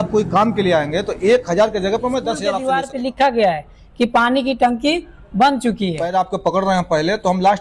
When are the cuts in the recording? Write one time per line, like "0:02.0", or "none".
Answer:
0:02.5
0:06.0